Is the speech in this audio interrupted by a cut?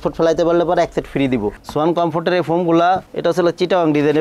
yes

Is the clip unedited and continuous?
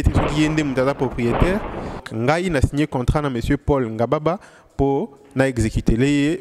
no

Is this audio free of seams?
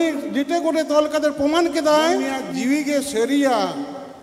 no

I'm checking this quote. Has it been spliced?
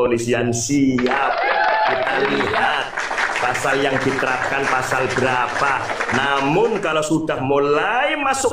no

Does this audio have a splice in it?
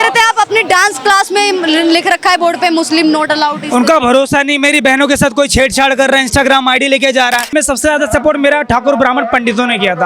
yes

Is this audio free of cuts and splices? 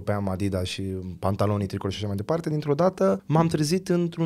no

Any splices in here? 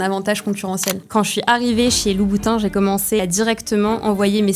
yes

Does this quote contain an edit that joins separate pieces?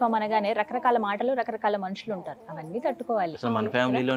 no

